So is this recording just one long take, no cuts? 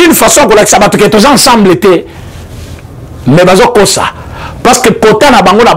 yes; 0 cuts

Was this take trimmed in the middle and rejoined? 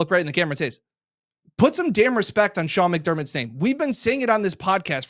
no; 0 cuts

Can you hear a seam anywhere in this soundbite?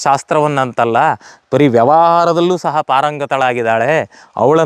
no; 0 cuts

